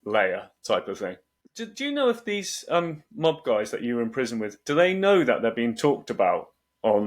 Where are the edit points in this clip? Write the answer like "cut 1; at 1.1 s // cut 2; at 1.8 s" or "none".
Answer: cut 1; at 1.2 s

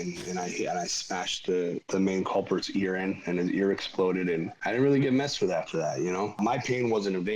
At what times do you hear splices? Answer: cut 1; at 1.8 s // cut 2; at 4.5 s // cut 3; at 6.4 s

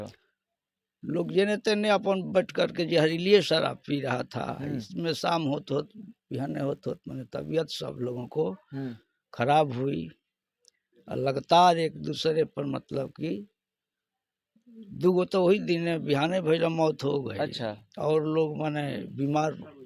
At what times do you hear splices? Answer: none

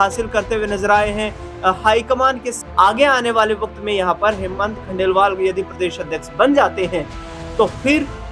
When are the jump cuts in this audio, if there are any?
cut 1; at 2.5 s

